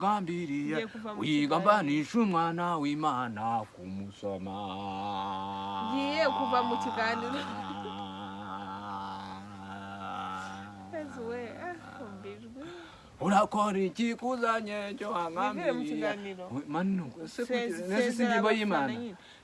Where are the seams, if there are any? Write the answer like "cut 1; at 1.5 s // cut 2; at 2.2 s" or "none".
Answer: none

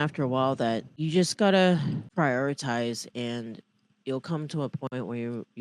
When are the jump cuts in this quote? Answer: cut 1; at 0.9 s // cut 2; at 2.0 s

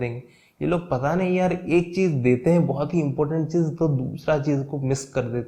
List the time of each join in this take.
none

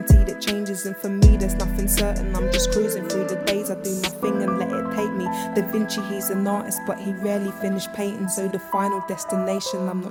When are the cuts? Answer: none

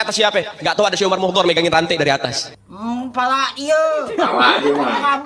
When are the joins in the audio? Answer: none

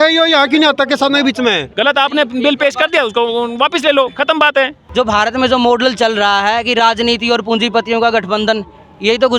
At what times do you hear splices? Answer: cut 1; at 1.7 s // cut 2; at 4.8 s

